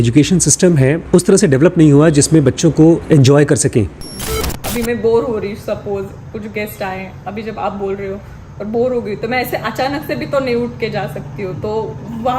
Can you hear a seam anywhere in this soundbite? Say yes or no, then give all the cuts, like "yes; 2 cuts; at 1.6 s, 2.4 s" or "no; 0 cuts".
yes; 3 cuts; at 1.0 s, 3.0 s, 4.4 s